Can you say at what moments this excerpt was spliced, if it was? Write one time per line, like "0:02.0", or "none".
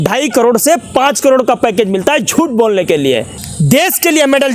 0:03.4